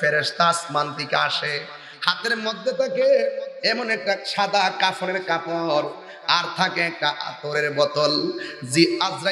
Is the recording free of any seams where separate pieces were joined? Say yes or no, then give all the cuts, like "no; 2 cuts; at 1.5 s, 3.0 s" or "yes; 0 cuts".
yes; 0 cuts